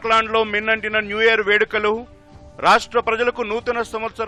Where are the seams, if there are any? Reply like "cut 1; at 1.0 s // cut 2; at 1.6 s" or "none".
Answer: none